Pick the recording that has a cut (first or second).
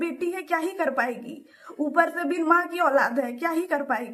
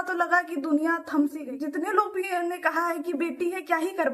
second